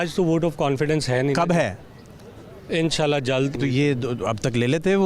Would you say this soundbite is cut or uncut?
cut